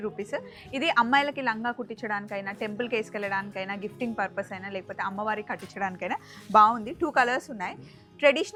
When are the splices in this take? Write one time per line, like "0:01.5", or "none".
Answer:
none